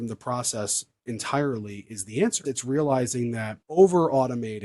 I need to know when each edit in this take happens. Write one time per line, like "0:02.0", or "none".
0:02.4
0:03.6